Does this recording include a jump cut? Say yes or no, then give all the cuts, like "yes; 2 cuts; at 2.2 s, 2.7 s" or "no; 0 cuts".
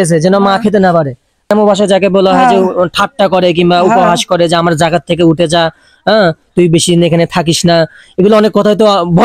yes; 1 cut; at 1.5 s